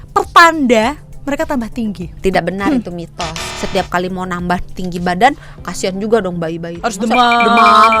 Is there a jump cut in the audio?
yes; 2 cuts; at 2.2 s, 3.4 s

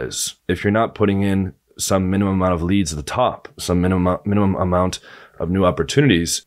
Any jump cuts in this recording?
no; 0 cuts

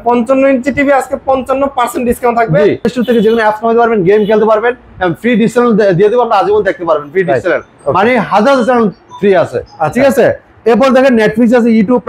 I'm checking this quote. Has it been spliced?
yes; 1 cut; at 2.9 s

